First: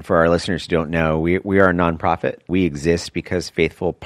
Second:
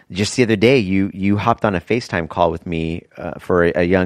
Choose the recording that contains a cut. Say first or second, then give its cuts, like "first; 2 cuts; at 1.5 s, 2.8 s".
first; 1 cut; at 2.5 s